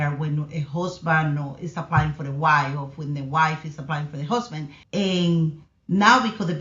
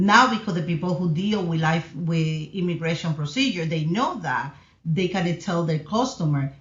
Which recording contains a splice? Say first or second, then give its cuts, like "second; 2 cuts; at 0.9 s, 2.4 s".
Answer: first; 1 cut; at 4.8 s